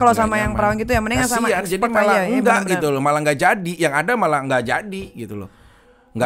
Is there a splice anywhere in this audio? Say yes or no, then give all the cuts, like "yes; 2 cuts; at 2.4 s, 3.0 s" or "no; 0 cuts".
no; 0 cuts